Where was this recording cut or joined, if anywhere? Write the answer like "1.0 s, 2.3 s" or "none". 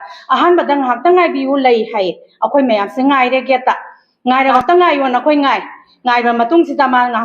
4.6 s